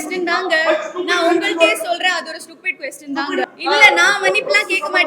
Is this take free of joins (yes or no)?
no